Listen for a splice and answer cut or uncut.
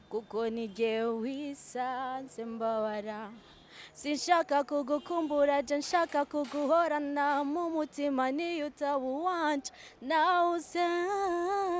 uncut